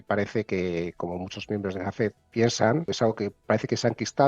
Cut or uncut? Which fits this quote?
cut